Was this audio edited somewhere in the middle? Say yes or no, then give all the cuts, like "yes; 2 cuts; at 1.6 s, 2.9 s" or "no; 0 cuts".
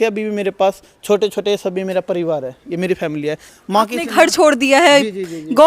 yes; 1 cut; at 3.5 s